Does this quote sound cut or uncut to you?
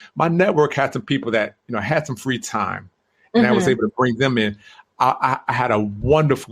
uncut